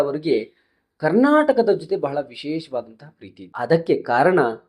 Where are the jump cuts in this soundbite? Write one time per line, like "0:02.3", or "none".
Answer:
0:03.5